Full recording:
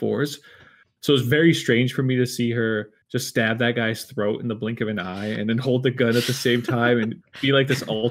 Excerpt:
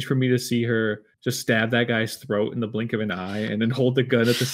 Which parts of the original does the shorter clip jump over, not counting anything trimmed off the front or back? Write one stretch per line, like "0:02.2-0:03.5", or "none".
none